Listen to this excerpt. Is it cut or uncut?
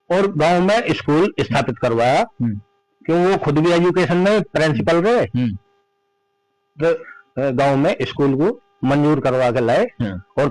uncut